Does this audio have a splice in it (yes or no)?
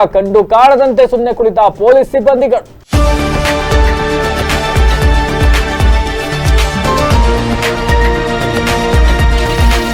yes